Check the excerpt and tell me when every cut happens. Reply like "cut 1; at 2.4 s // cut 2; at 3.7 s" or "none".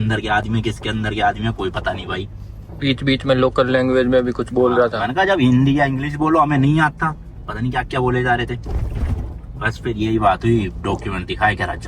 none